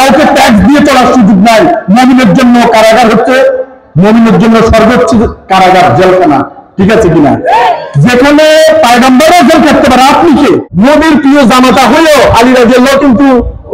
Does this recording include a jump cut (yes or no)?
yes